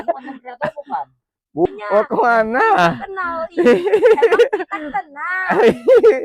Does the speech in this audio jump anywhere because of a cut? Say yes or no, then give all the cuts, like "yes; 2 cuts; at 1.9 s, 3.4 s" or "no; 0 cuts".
yes; 1 cut; at 1.6 s